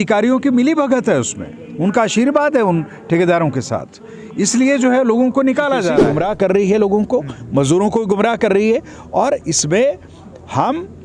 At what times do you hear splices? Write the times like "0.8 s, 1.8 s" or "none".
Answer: 6.0 s